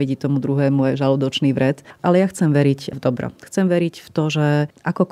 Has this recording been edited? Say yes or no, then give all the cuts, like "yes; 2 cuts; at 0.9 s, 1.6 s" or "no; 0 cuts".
yes; 1 cut; at 1.9 s